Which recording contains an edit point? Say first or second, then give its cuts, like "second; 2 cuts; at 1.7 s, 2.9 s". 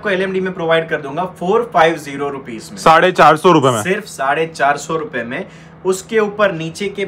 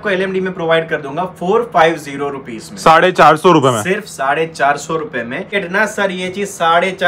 second; 1 cut; at 5.5 s